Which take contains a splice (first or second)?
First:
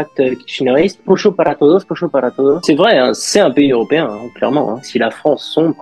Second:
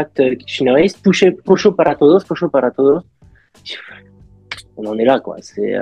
first